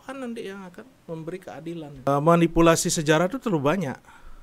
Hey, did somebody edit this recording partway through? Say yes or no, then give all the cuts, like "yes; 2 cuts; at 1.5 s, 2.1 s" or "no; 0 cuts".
yes; 1 cut; at 2.1 s